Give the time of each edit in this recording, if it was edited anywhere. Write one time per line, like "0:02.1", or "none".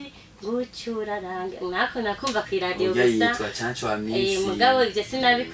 none